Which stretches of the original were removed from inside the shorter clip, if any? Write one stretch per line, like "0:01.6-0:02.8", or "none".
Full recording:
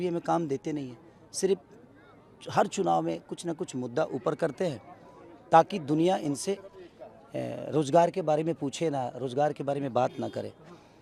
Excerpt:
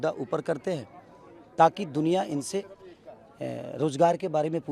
none